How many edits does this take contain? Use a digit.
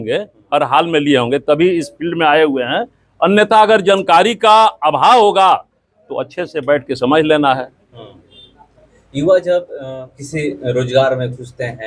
0